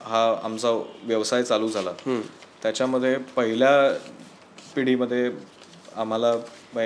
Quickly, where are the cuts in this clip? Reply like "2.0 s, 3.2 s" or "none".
none